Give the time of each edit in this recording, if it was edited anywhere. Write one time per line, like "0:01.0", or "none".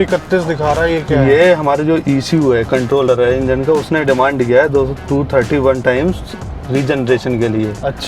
none